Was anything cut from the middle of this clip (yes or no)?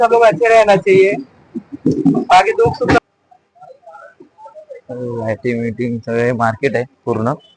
yes